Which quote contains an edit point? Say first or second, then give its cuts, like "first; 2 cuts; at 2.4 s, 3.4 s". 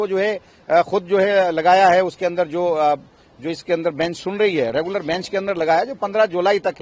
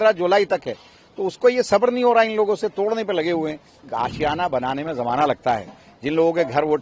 second; 1 cut; at 3.9 s